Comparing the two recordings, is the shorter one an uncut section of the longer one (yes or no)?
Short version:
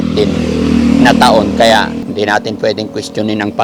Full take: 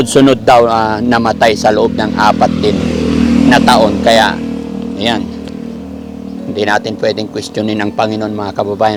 no